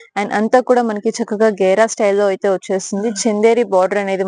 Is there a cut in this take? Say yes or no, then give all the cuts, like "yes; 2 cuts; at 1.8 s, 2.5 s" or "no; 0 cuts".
no; 0 cuts